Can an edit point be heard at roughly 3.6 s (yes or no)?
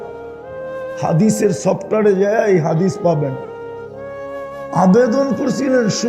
no